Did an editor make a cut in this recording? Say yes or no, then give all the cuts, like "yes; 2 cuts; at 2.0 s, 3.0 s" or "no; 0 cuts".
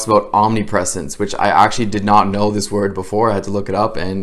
no; 0 cuts